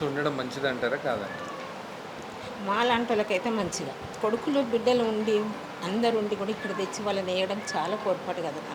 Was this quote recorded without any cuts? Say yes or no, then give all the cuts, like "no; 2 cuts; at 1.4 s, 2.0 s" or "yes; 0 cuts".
no; 1 cut; at 4.1 s